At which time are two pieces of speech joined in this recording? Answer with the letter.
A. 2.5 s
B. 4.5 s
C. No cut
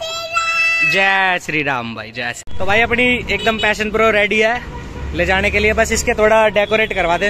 A